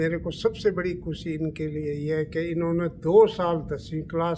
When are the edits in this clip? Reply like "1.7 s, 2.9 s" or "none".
none